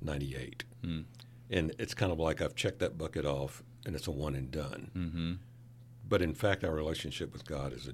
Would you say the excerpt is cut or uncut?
uncut